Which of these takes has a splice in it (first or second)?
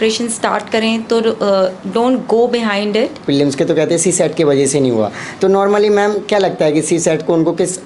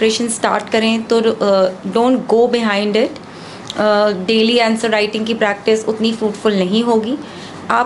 first